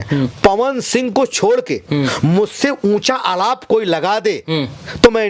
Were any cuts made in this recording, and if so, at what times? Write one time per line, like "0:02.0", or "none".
none